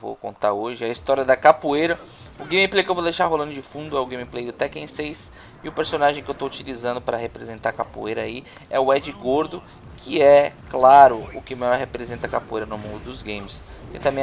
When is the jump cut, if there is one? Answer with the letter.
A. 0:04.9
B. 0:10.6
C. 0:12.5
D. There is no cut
C